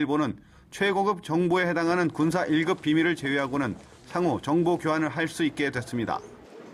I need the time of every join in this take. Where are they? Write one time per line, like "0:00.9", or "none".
0:05.8